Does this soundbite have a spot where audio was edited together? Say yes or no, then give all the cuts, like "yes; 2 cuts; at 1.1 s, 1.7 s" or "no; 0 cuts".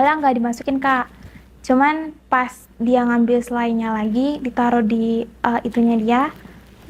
no; 0 cuts